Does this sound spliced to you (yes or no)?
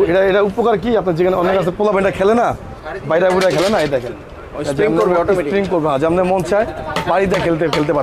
no